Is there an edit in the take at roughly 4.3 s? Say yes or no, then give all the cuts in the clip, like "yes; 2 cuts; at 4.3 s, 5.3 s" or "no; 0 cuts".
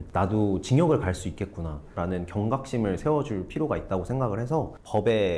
no; 1 cut; at 2.0 s